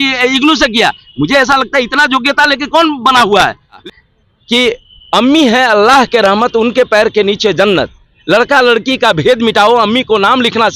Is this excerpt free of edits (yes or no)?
no